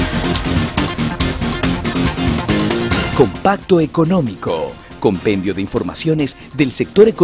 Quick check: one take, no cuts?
no; 1 cut; at 1.3 s

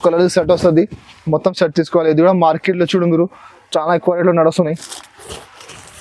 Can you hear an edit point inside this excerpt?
no; 0 cuts

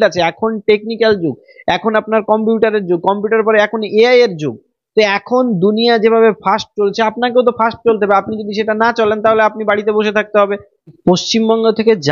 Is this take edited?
yes; 1 cut; at 11.0 s

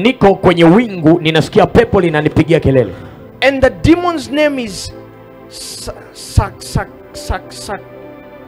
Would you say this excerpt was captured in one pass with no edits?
yes; 0 cuts

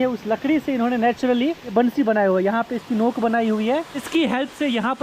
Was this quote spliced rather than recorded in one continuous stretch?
yes; 2 cuts; at 1.7 s, 4.0 s

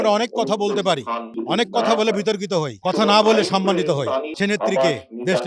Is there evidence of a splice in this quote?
yes; 3 cuts; at 1.3 s, 2.7 s, 4.3 s

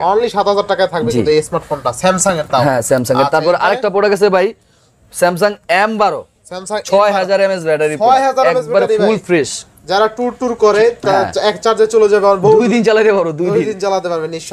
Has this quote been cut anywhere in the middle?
no; 0 cuts

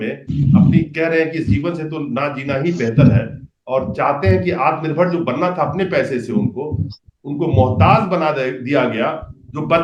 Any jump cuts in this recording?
no; 0 cuts

